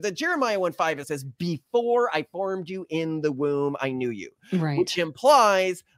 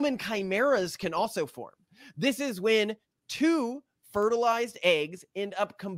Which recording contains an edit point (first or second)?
first